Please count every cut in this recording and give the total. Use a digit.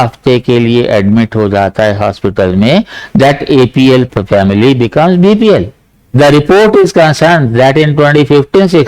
1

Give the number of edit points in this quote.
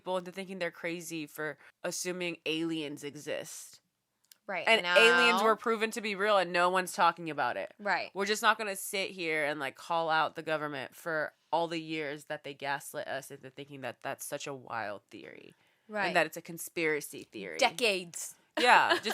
1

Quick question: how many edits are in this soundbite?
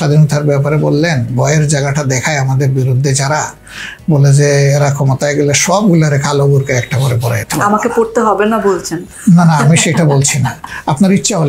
1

